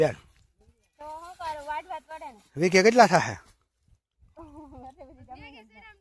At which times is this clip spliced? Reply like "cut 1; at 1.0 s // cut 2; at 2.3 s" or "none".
none